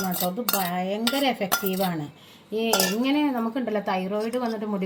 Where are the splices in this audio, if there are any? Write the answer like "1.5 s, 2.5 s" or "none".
none